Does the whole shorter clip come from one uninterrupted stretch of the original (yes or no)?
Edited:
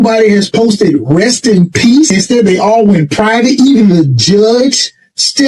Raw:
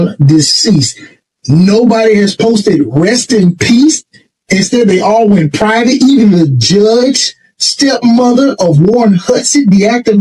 no